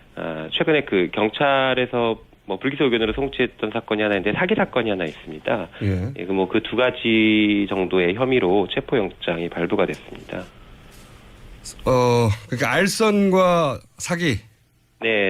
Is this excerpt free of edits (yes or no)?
yes